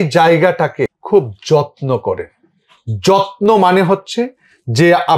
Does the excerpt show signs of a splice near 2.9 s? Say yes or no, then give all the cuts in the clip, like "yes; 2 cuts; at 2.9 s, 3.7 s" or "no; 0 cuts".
no; 1 cut; at 1.0 s